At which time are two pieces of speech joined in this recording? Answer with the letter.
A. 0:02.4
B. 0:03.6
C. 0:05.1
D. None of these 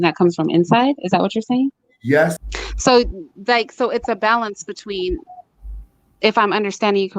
A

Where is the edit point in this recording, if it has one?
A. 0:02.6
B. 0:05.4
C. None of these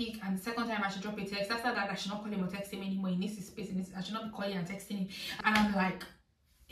B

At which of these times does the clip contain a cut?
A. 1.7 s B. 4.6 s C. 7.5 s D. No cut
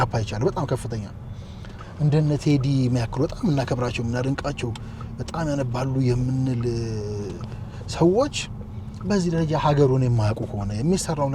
A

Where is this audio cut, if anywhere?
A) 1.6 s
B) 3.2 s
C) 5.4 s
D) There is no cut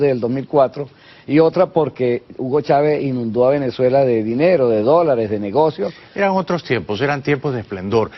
C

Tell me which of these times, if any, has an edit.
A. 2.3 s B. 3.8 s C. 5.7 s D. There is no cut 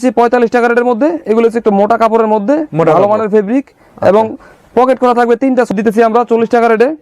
C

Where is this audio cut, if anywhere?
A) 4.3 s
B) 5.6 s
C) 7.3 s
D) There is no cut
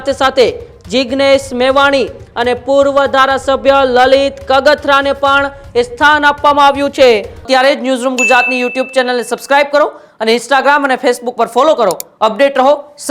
C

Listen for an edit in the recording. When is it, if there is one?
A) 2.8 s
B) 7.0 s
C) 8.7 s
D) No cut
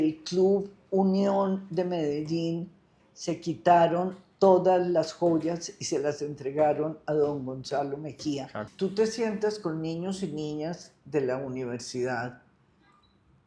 C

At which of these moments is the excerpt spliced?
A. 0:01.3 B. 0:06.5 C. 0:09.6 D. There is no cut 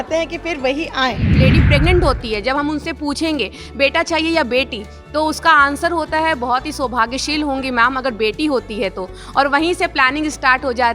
A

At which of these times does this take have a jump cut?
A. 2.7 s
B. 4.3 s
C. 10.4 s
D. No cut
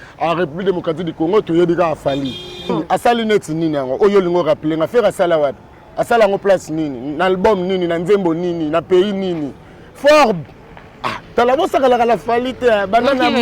A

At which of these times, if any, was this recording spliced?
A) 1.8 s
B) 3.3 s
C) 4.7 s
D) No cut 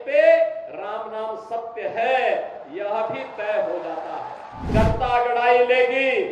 C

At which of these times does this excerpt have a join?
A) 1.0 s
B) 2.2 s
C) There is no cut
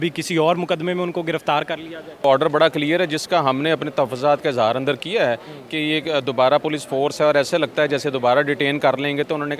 B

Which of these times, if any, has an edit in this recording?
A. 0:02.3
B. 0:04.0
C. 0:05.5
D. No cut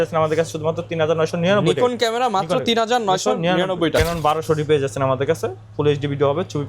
B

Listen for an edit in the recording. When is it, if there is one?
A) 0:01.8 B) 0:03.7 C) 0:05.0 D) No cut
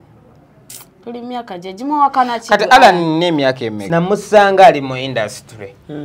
B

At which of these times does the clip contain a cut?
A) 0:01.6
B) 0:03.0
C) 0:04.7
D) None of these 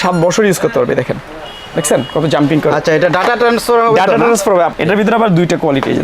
C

